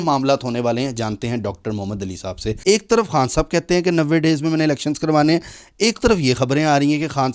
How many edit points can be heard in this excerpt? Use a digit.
1